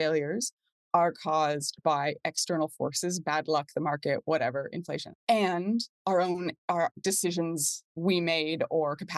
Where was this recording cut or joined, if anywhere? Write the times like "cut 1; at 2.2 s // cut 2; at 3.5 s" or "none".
cut 1; at 5.1 s // cut 2; at 5.9 s // cut 3; at 7.0 s